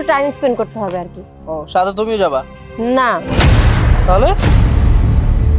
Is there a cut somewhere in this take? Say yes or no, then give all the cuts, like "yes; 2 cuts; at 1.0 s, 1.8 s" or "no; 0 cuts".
no; 0 cuts